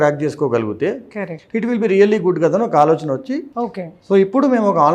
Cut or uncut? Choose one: uncut